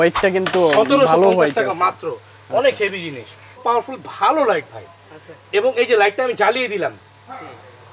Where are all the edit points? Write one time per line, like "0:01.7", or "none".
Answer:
0:03.6